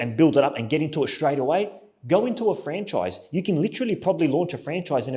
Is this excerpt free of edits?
yes; 0 cuts

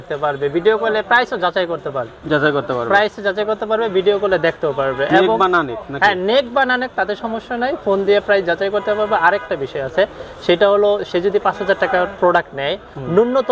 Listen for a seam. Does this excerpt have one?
no; 0 cuts

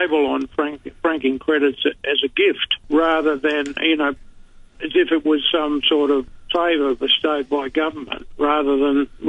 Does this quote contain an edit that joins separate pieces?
yes; 2 cuts; at 2.7 s, 6.3 s

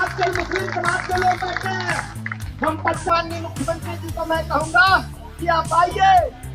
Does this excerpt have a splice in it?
yes; 1 cut; at 3.1 s

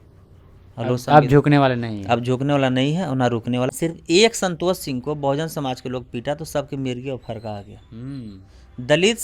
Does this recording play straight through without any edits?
no; 1 cut; at 3.7 s

